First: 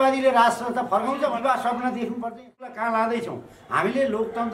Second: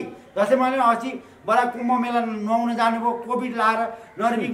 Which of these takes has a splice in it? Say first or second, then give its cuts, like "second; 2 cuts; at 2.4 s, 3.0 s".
first; 1 cut; at 2.7 s